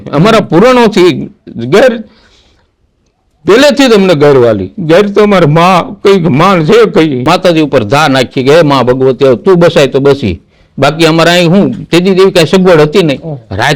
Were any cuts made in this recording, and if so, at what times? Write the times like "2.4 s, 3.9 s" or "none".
7.3 s